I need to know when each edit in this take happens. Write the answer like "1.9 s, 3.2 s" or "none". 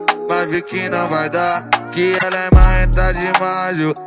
2.2 s